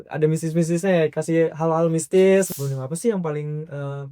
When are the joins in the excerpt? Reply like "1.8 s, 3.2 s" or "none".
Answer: 2.5 s

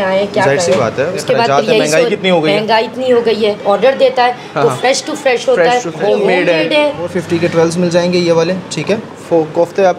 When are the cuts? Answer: 1.2 s, 3.6 s, 5.9 s, 7.1 s, 9.1 s

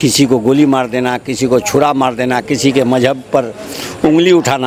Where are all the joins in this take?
none

